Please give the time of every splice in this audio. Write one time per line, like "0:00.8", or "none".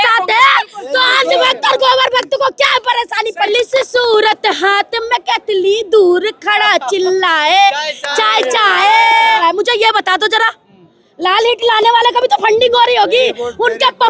0:03.5
0:09.4